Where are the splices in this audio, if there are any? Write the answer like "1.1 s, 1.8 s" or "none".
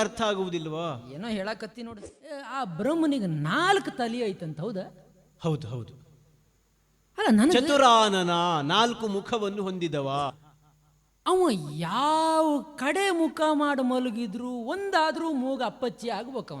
2.5 s, 10.5 s